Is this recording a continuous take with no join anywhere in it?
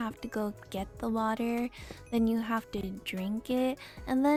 yes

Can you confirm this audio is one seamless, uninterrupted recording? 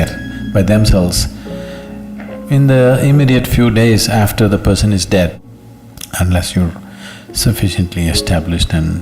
no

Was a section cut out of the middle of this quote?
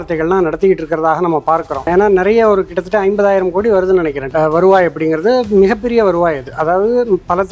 yes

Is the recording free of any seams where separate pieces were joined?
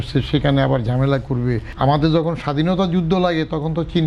no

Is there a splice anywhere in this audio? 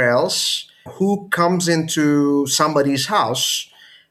no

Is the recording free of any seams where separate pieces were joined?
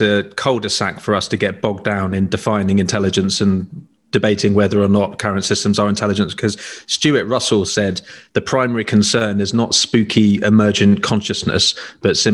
yes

